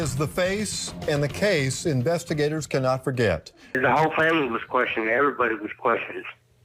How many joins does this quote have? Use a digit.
1